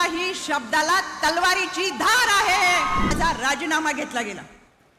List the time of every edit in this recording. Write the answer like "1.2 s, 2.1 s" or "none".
3.1 s